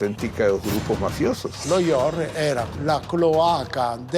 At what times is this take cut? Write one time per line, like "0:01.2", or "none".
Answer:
0:01.6
0:02.7